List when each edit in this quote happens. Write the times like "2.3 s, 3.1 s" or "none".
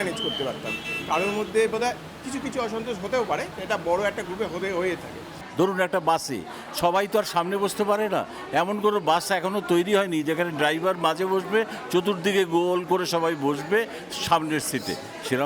5.4 s